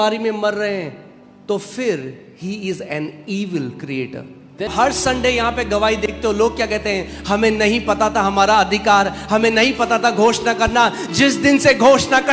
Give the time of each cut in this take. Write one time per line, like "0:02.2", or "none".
0:04.7